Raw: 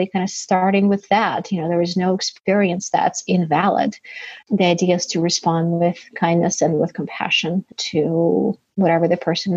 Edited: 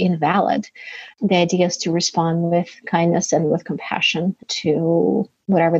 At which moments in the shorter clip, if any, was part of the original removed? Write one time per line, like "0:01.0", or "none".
none